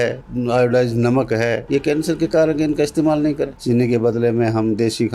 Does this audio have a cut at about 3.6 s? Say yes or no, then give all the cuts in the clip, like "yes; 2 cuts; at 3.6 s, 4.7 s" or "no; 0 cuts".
yes; 1 cut; at 3.6 s